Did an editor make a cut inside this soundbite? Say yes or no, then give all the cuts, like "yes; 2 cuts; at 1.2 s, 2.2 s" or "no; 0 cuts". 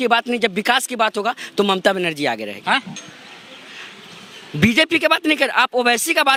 no; 0 cuts